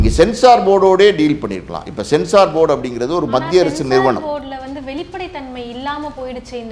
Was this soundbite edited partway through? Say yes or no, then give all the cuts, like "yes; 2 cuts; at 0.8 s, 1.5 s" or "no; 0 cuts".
no; 0 cuts